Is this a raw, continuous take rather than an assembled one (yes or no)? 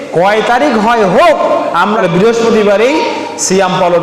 no